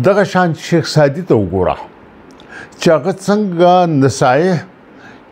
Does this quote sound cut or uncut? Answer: uncut